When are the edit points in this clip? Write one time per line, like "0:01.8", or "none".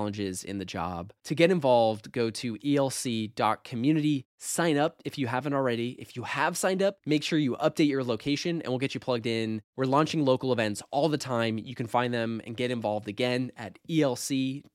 none

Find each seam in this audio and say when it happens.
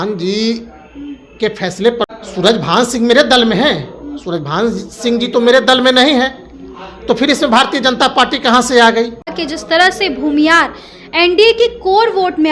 0:02.1
0:09.4

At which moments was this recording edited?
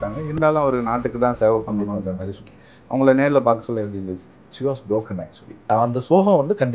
0:05.7

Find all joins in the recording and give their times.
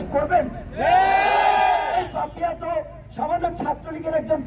0:01.9

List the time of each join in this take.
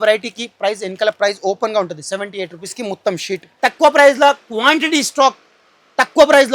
0:03.4

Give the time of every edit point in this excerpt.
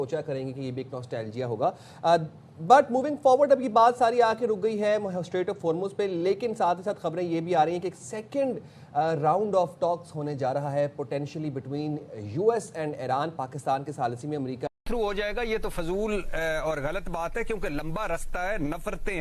0:14.7

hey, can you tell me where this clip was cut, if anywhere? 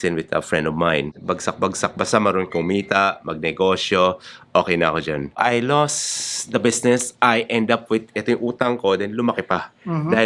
0:01.1
0:05.4

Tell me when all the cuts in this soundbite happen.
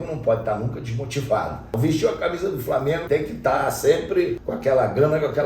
0:01.8
0:03.0
0:04.4

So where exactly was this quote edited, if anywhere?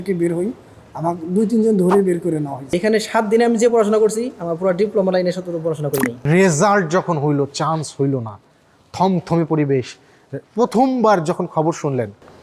0:02.7
0:06.2

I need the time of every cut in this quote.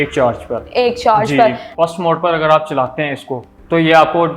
0:01.7

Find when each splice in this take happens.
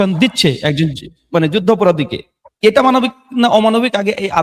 none

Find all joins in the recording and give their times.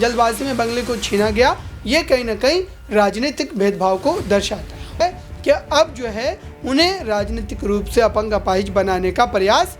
0:05.0

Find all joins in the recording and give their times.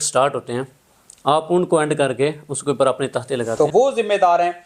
0:03.7

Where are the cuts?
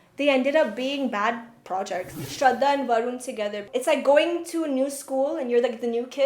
0:02.2
0:03.7

